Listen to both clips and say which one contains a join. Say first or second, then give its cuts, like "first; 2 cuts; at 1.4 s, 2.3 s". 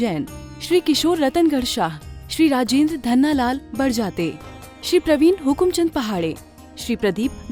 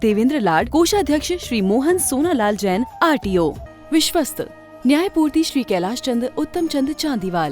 second; 1 cut; at 3.7 s